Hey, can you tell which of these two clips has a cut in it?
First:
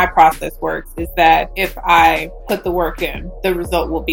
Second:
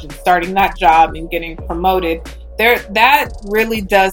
first; 3 cuts; at 1.6 s, 2.3 s, 3.2 s

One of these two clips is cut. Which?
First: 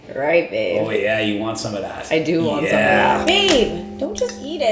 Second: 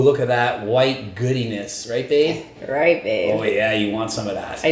first; 1 cut; at 3.2 s

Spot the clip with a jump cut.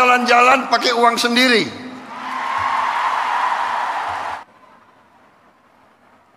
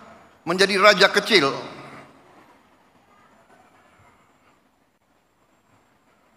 first; 1 cut; at 4.4 s

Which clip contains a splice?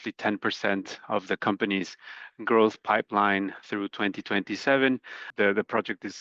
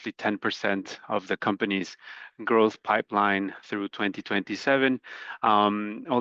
first; 1 cut; at 5.3 s

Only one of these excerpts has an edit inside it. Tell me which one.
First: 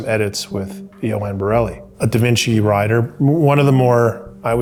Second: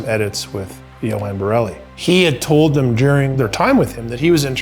second; 2 cuts; at 1.8 s, 3.3 s

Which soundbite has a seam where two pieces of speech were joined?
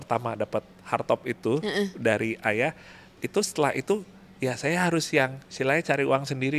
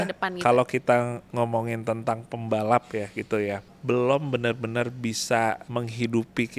second; 3 cuts; at 1.2 s, 3.7 s, 5.6 s

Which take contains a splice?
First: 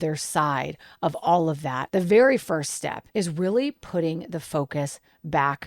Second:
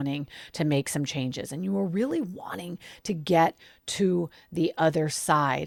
first; 2 cuts; at 1.8 s, 2.9 s

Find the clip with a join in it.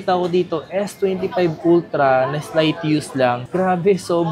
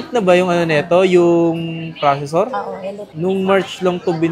second; 1 cut; at 3.0 s

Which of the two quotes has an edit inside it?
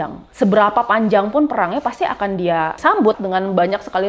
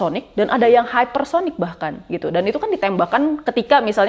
first; 1 cut; at 3.1 s

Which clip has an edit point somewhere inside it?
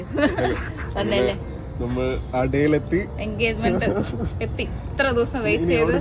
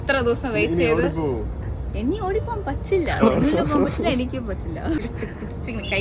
second; 1 cut; at 5.0 s

